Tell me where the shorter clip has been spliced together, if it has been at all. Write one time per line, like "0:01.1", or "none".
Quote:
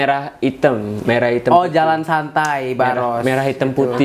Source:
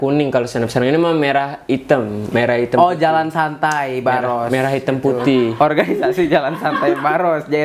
none